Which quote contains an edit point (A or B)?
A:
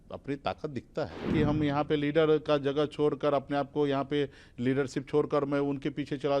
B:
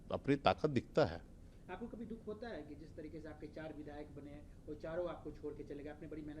A